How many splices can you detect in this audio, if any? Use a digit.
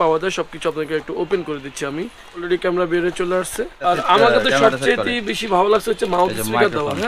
2